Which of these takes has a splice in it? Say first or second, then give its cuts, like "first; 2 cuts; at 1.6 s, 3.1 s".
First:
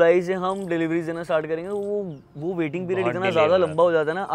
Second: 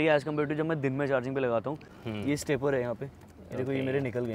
second; 1 cut; at 1.9 s